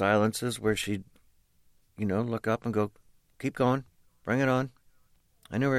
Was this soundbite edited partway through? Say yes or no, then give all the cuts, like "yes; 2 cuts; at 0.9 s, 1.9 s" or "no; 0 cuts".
yes; 1 cut; at 3.0 s